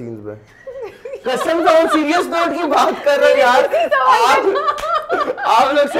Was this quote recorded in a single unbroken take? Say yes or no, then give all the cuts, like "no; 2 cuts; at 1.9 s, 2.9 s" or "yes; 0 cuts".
yes; 0 cuts